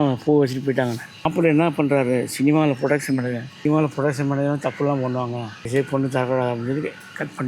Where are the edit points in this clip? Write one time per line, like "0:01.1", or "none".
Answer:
0:01.3
0:03.5
0:05.7